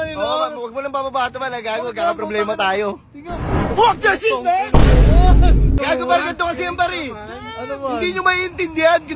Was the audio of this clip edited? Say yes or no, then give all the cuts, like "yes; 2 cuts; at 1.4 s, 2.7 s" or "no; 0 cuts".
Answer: yes; 1 cut; at 5.8 s